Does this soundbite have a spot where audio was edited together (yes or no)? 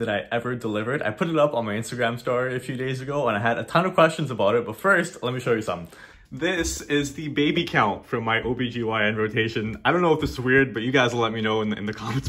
no